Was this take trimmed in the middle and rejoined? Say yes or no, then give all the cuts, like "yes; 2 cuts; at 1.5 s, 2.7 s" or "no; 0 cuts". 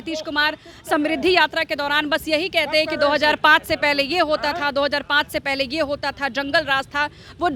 no; 0 cuts